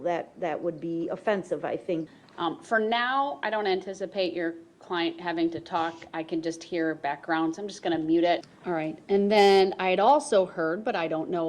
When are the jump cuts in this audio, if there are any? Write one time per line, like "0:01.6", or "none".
0:02.0
0:08.5